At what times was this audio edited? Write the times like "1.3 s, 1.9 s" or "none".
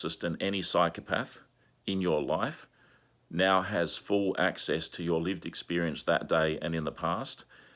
none